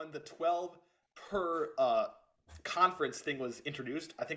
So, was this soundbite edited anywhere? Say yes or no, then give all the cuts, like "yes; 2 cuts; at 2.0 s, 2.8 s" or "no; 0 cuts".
no; 0 cuts